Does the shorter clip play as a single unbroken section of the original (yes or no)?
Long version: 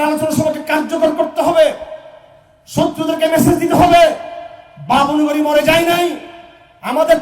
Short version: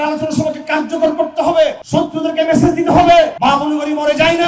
no